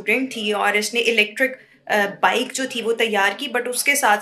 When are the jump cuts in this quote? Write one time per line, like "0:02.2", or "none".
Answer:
none